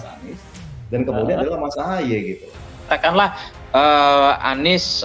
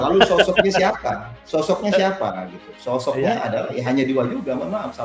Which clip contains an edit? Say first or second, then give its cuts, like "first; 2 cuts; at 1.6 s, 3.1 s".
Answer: first; 1 cut; at 2.9 s